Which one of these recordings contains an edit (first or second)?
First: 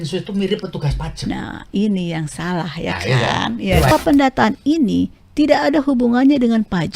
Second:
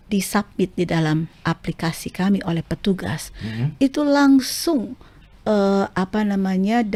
first